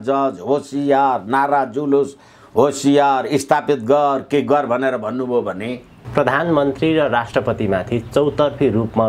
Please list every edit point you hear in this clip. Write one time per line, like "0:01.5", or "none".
0:06.0
0:07.2